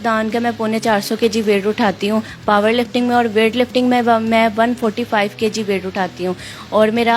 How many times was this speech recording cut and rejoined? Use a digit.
0